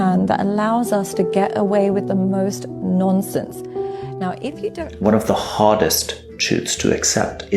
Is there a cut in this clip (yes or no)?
yes